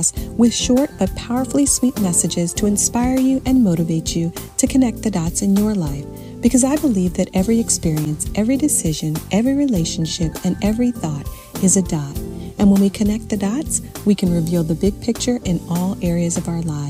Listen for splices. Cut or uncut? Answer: uncut